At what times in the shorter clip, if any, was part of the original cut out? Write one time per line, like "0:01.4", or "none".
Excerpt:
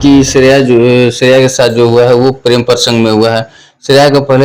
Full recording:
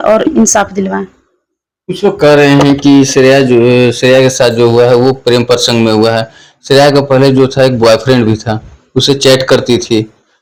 none

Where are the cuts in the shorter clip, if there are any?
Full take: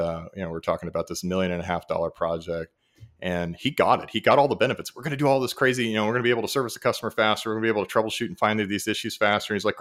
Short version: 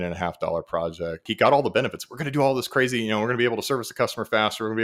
0:01.3

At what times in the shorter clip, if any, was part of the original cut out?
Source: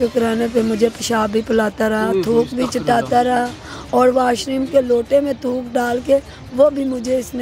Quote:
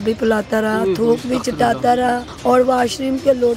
0:02.3

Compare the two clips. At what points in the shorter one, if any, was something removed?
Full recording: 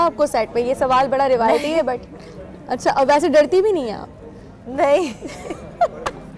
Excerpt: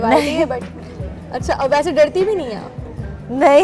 none

